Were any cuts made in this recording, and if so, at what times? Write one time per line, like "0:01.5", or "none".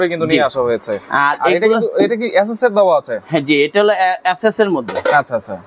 none